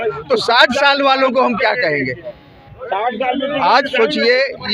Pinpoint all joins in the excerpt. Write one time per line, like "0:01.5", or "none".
none